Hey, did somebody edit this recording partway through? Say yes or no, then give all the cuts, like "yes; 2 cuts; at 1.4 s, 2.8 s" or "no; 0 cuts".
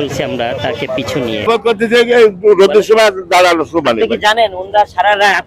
yes; 1 cut; at 1.5 s